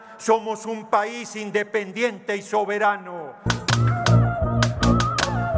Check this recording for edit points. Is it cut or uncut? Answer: cut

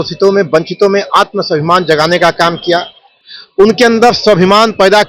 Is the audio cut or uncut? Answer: uncut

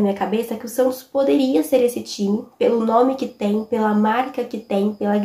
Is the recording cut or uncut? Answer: uncut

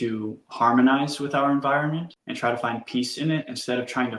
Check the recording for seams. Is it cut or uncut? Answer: cut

